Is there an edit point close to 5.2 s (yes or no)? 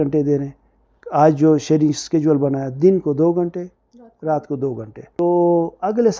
yes